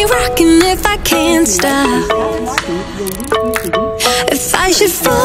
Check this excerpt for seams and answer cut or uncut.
uncut